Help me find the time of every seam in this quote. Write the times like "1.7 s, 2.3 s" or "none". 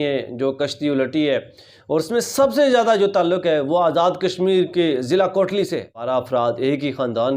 6.0 s

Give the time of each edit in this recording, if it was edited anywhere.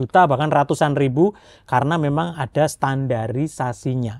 none

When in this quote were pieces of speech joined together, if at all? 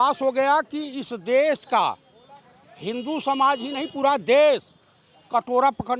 none

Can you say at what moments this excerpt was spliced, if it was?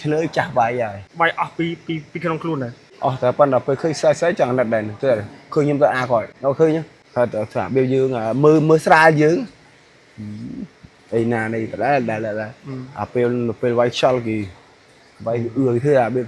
1.0 s, 2.8 s, 6.3 s, 7.0 s

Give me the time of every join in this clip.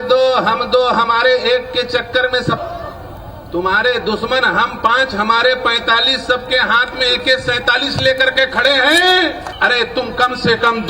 2.6 s

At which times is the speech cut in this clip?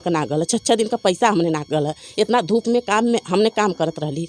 none

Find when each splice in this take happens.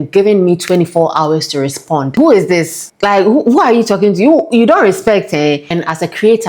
2.1 s, 5.7 s

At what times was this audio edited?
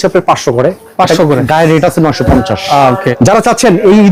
3.1 s

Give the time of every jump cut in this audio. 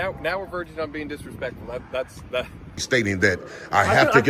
2.7 s

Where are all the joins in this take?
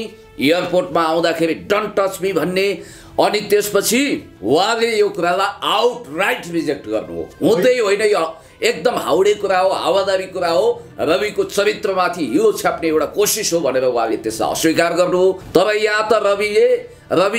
4.3 s, 15.4 s

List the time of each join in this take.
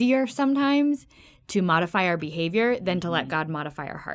none

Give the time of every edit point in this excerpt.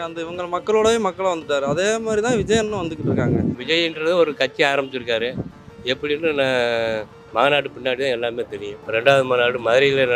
3.6 s, 8.8 s

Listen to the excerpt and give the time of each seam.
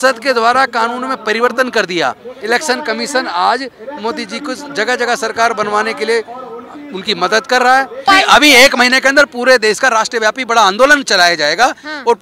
2.3 s, 8.1 s

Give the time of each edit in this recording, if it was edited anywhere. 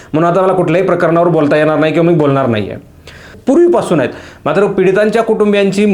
3.3 s

